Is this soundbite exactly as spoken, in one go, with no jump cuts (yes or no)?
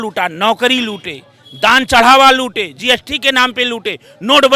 yes